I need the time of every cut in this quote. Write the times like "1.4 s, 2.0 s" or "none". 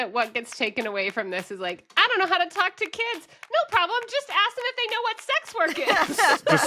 none